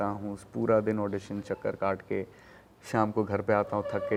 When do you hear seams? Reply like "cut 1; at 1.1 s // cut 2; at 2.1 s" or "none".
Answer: none